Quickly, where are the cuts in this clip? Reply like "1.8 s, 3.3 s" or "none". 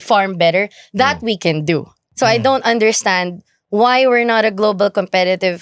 2.0 s